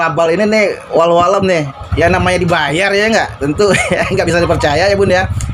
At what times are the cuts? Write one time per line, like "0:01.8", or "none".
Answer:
none

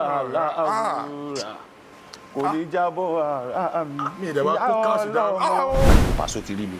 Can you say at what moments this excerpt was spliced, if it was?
0:05.9

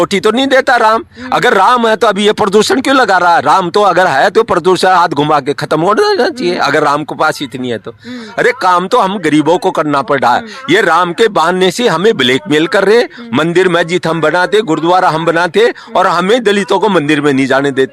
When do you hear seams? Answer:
none

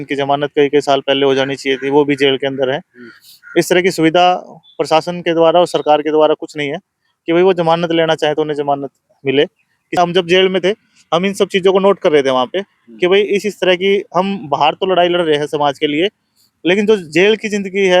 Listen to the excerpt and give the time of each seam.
0:10.0

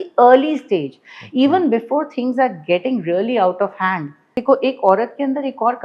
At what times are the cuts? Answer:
0:04.3

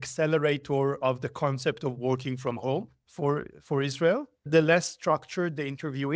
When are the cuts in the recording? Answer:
0:03.0
0:04.5

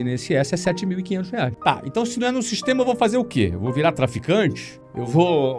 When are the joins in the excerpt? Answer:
0:01.5

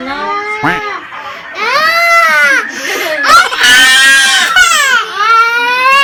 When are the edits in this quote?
none

